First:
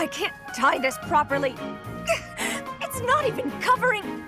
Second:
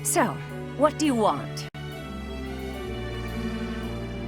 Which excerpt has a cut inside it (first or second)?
second